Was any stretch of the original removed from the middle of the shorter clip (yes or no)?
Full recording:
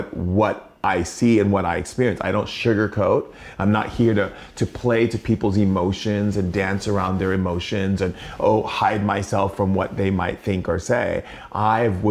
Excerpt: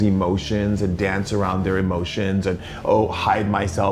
no